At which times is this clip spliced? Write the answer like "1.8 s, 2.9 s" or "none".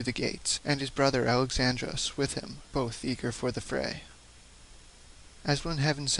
4.0 s